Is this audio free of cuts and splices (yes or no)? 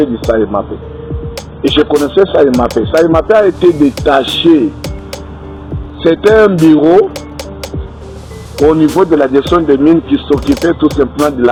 yes